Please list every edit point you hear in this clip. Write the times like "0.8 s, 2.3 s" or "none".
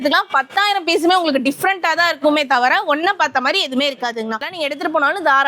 4.4 s